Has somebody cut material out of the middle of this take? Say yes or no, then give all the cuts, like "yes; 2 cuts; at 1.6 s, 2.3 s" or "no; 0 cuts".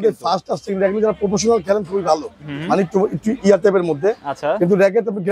no; 0 cuts